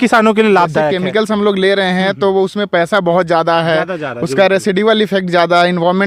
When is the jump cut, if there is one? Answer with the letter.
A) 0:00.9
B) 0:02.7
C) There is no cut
A